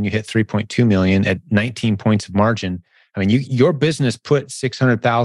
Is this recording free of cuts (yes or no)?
no